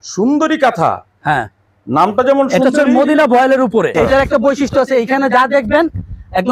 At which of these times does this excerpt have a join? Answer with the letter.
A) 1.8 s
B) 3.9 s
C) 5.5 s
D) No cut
B